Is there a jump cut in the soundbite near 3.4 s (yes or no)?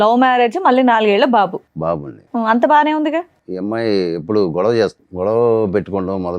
yes